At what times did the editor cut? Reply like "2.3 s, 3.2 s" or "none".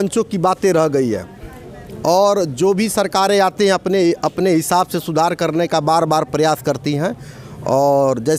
none